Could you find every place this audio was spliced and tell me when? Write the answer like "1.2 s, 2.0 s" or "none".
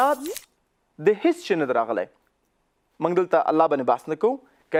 none